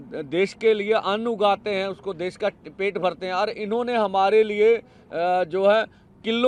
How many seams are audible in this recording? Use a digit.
0